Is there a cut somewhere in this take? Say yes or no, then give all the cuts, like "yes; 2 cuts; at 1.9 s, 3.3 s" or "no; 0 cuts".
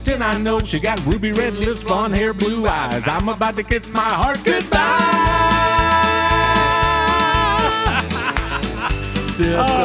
no; 0 cuts